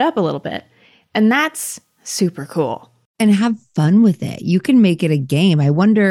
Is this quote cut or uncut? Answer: cut